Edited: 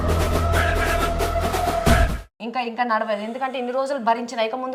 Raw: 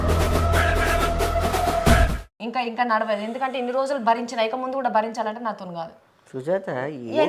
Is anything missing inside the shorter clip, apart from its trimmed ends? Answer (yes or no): no